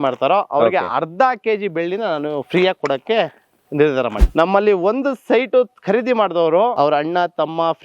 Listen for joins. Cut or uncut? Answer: cut